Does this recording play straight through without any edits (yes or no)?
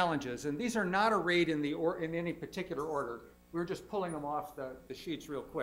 yes